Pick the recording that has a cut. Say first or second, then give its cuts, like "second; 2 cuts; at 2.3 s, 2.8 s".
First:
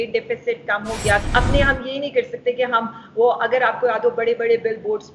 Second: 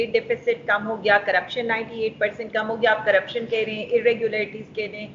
first; 1 cut; at 1.2 s